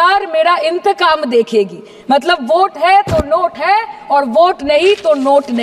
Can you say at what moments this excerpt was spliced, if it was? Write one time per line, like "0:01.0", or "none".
none